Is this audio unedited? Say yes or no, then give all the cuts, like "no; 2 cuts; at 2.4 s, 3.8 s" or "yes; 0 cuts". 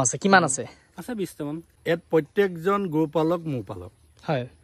no; 1 cut; at 1.7 s